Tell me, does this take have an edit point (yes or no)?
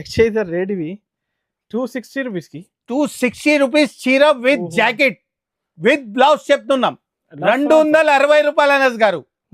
no